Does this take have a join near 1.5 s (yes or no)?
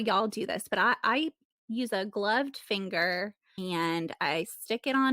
no